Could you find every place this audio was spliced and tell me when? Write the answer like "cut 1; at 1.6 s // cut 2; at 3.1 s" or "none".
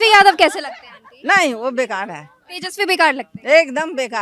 none